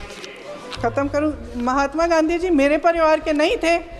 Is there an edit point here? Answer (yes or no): no